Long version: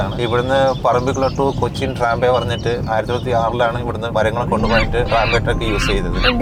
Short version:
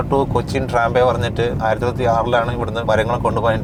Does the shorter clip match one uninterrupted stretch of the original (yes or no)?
yes